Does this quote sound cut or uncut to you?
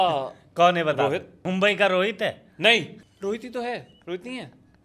cut